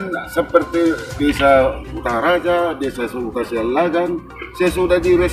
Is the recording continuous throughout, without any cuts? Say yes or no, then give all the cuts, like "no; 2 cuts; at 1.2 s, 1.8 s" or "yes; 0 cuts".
no; 1 cut; at 1.1 s